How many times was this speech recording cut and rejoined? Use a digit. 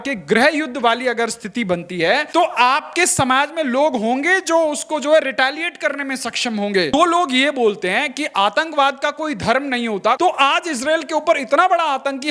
3